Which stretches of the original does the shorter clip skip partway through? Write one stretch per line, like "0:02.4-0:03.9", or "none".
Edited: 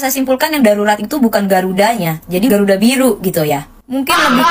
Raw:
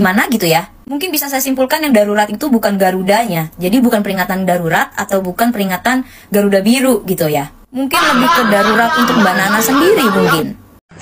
0:03.8-0:06.3